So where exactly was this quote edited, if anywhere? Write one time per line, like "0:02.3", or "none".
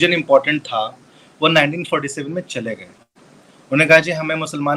none